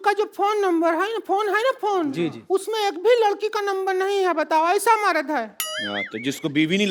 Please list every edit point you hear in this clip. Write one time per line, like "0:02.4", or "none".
none